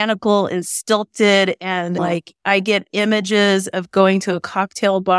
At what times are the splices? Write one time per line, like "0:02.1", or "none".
0:02.0